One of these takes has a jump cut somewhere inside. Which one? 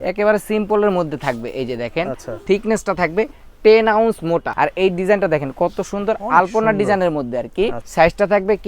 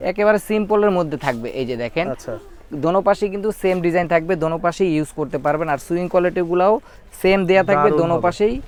first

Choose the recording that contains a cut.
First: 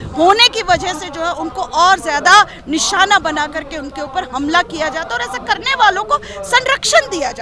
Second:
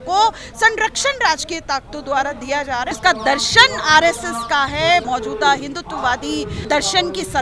second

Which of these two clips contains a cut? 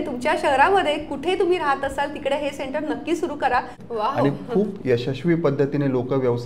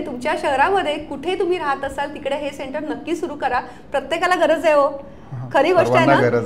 first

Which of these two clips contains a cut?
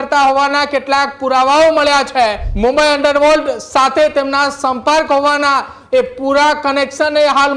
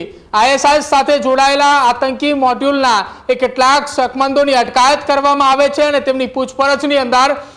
first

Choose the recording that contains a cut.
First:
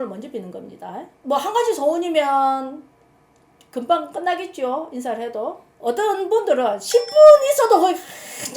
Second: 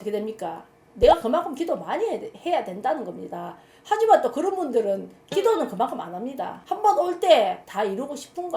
first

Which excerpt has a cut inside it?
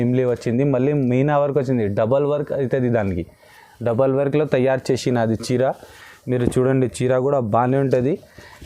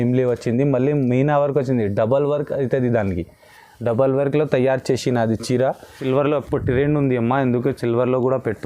second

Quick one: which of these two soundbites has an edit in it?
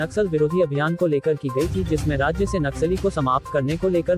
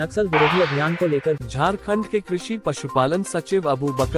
second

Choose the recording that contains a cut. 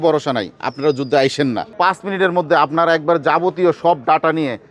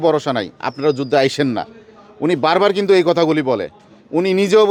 first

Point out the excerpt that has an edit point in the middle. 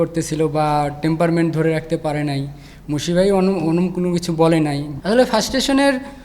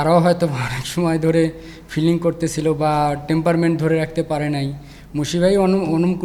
first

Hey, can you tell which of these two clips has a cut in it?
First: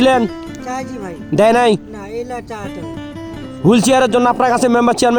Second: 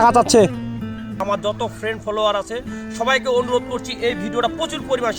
second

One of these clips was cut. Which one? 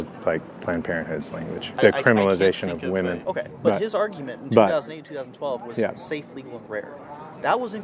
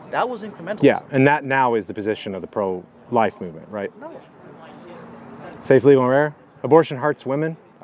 first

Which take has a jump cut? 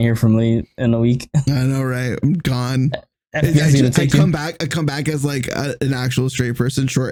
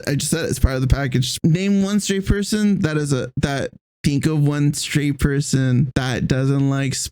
second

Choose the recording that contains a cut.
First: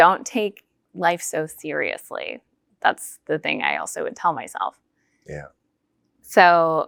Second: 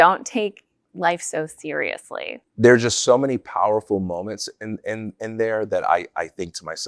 second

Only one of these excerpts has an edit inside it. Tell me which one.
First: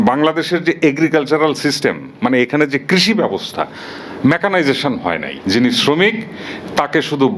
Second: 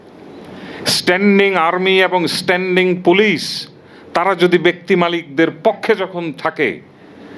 first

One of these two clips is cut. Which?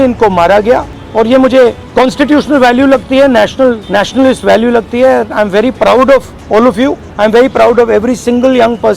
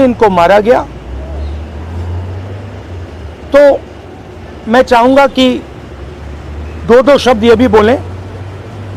first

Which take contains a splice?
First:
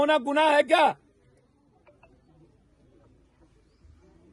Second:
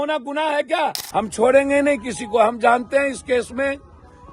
second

